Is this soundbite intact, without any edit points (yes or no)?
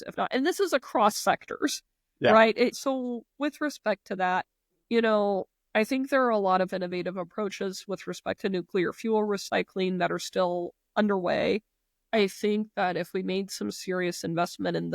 no